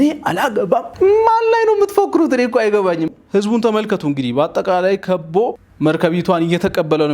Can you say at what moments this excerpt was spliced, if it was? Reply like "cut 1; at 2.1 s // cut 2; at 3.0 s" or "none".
cut 1; at 3.1 s // cut 2; at 5.6 s

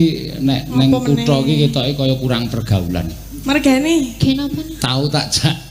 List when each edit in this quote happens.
none

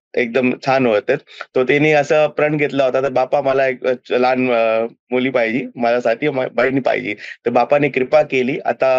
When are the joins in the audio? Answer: none

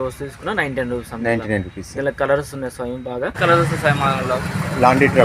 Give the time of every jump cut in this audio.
cut 1; at 3.3 s

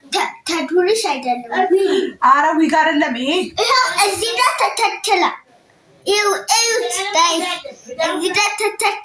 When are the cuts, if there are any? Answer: none

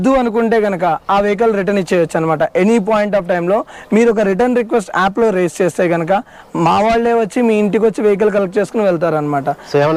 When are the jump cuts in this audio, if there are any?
none

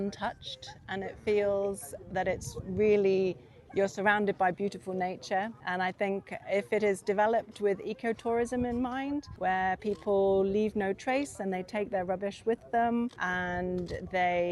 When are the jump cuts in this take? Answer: cut 1; at 5.6 s // cut 2; at 9.3 s // cut 3; at 13.2 s

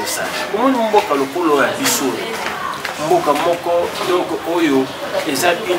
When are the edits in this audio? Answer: none

